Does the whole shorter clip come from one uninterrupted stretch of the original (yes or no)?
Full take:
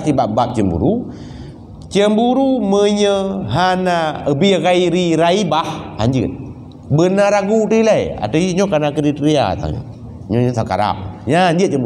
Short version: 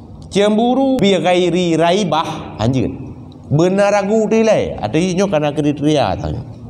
no